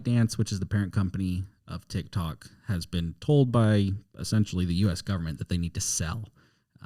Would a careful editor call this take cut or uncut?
uncut